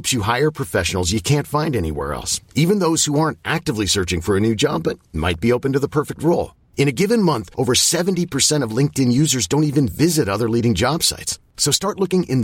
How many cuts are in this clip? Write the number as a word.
zero